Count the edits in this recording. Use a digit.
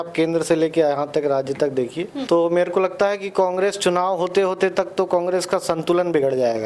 1